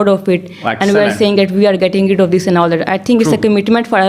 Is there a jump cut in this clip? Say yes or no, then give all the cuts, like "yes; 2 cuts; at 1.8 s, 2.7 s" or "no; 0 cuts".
no; 0 cuts